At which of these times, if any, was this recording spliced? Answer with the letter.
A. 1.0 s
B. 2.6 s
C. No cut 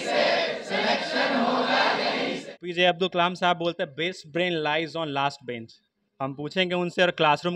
B